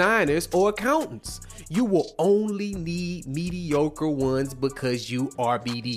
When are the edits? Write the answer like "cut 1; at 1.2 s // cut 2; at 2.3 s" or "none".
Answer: none